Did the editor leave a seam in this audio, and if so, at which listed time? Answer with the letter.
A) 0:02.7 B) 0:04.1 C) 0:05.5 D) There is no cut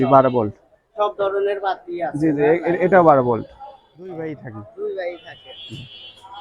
B